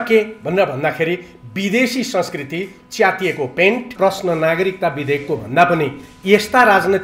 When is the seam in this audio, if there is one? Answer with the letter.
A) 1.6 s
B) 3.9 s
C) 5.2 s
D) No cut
B